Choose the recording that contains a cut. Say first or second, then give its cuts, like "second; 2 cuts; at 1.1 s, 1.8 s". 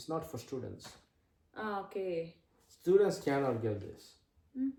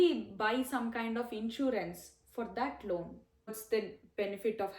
second; 1 cut; at 3.5 s